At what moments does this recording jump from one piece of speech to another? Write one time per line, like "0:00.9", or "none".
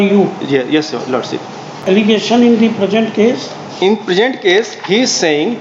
0:01.9